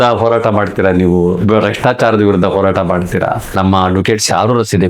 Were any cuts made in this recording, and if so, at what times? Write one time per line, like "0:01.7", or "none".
0:03.5